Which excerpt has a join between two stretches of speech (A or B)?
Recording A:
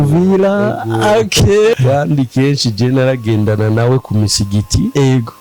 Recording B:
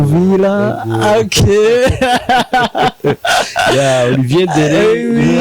A